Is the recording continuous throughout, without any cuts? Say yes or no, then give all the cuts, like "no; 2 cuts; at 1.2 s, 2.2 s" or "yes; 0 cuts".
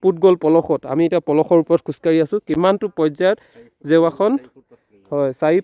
yes; 0 cuts